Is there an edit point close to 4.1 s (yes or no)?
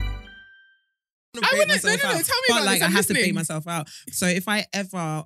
no